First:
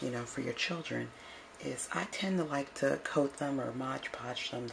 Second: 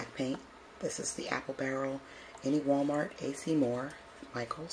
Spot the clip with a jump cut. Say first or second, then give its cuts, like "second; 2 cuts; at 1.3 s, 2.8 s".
first; 1 cut; at 3.4 s